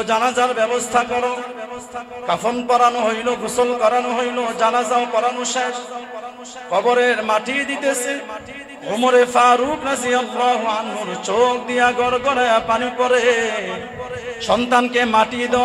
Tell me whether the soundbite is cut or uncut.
cut